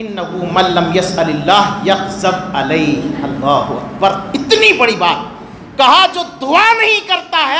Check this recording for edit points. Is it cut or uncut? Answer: uncut